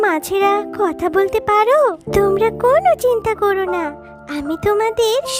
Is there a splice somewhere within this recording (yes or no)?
no